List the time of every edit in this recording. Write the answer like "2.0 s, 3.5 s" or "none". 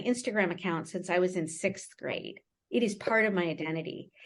none